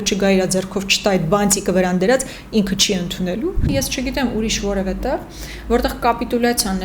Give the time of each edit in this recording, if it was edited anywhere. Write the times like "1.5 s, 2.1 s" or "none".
3.7 s